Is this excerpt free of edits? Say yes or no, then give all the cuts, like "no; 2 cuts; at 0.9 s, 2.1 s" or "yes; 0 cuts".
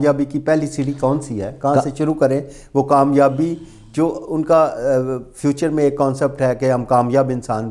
yes; 0 cuts